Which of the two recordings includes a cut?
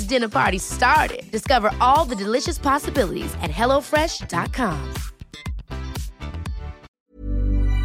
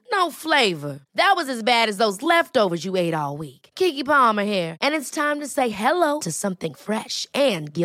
first; 1 cut; at 6.9 s

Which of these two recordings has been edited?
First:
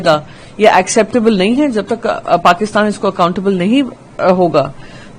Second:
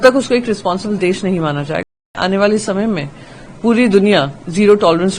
second; 1 cut; at 1.9 s

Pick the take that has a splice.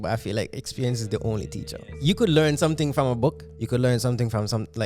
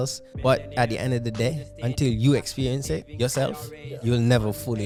first; 2 cuts; at 1.9 s, 3.5 s

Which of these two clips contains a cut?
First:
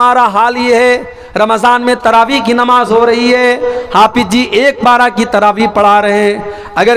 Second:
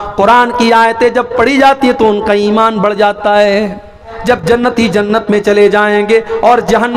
second; 1 cut; at 4.1 s

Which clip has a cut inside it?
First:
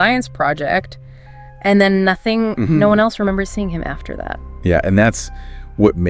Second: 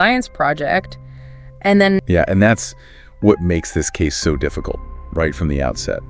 second; 1 cut; at 2.0 s

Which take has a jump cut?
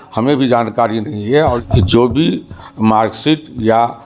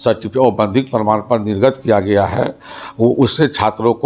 first; 1 cut; at 1.6 s

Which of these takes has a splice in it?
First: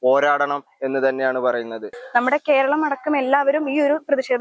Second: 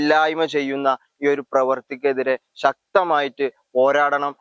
first; 1 cut; at 1.9 s

